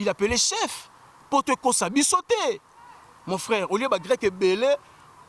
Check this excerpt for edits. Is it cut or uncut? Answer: uncut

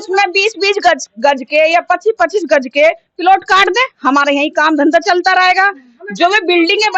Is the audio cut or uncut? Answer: uncut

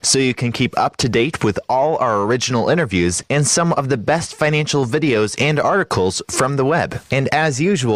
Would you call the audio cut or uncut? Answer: cut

